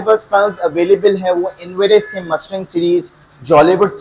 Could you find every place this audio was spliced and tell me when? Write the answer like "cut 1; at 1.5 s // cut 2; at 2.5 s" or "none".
none